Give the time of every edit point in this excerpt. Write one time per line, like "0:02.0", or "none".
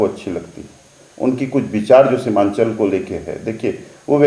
none